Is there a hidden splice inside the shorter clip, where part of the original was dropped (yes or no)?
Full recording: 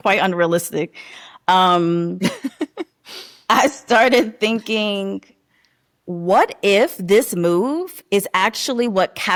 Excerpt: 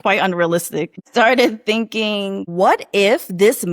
yes